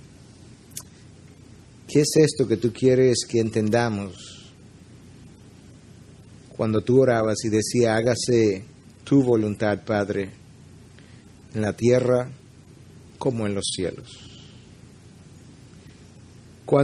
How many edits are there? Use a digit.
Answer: 0